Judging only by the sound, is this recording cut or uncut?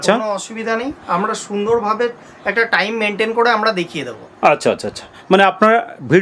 uncut